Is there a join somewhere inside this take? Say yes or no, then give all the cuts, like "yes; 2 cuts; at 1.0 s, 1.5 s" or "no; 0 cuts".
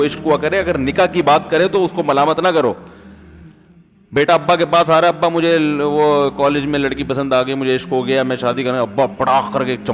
no; 0 cuts